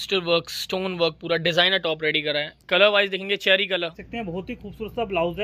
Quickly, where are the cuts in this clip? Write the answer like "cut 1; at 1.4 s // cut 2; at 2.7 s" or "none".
cut 1; at 4.1 s